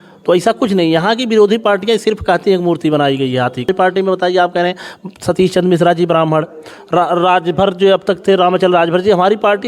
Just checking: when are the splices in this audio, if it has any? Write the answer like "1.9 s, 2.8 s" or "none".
3.7 s

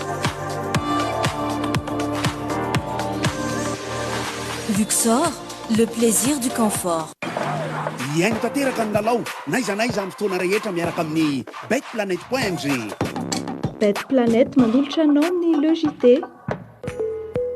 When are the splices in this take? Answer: 16.7 s

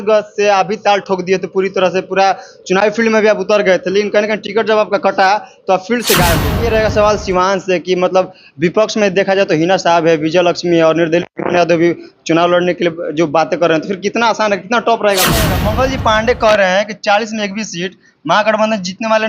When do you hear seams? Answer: 6.5 s, 15.6 s

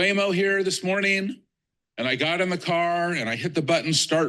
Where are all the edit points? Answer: none

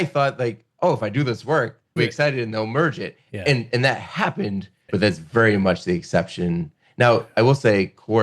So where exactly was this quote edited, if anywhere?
2.0 s, 4.7 s

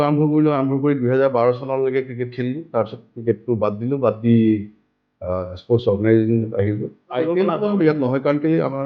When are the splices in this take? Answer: 7.1 s

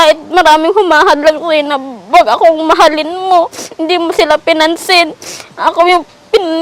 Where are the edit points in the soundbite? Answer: none

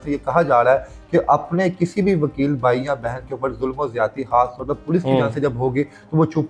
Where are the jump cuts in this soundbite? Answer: none

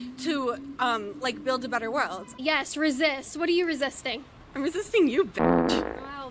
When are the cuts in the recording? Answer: 2.3 s

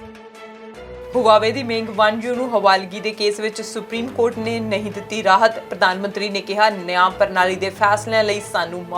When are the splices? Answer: 1.1 s

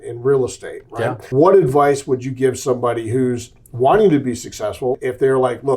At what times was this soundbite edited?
1.2 s, 5.0 s

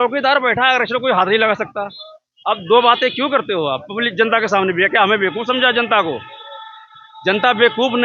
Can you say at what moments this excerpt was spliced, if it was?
none

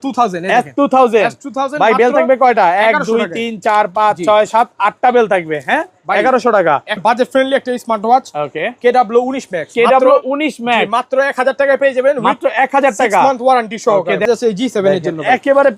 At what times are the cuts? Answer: 7.0 s, 14.3 s

